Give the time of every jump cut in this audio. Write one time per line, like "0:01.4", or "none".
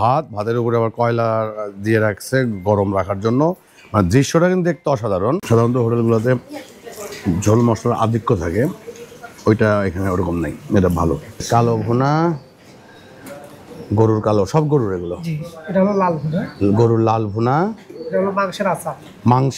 0:05.4
0:11.3